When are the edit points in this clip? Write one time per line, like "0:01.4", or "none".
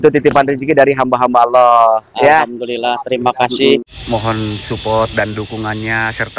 0:03.8